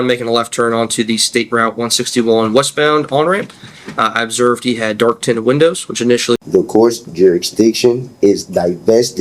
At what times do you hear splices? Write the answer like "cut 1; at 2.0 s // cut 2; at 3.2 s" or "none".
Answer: cut 1; at 6.4 s